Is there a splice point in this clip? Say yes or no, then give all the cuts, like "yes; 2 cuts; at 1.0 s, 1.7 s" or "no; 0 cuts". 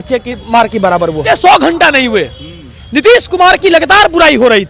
yes; 1 cut; at 1.2 s